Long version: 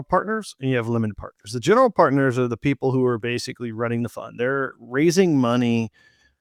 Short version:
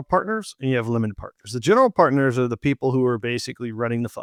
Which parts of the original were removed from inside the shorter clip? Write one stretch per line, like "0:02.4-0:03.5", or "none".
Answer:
none